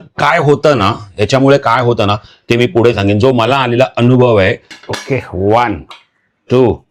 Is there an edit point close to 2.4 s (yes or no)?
no